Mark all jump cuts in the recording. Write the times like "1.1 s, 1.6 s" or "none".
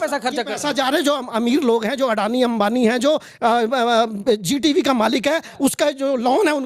none